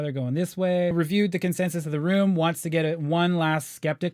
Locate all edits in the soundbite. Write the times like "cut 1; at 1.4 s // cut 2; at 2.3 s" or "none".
cut 1; at 0.9 s